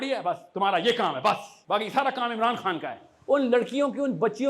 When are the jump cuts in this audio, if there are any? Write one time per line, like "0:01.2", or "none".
0:01.5
0:03.1